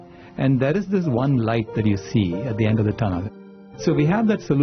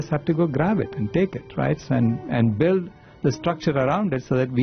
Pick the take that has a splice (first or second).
first